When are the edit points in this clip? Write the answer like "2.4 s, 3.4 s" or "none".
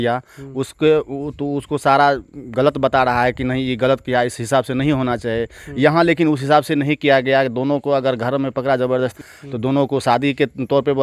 9.3 s